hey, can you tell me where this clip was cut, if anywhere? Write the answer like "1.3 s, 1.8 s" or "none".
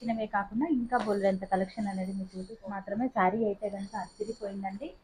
2.8 s